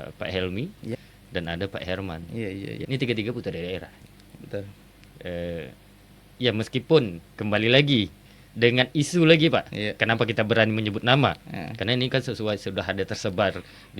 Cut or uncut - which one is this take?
cut